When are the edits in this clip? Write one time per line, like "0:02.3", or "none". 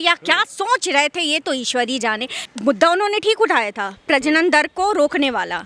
0:02.3